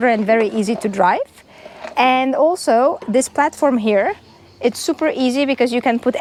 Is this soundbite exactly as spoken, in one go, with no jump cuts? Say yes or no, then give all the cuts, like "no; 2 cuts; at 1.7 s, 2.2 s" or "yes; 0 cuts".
yes; 0 cuts